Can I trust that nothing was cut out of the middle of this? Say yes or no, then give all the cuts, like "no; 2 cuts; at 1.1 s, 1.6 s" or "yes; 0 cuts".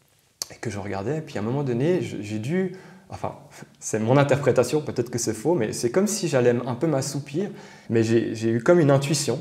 no; 1 cut; at 7.7 s